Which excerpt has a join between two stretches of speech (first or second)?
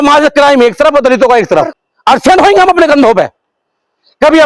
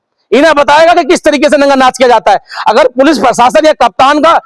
first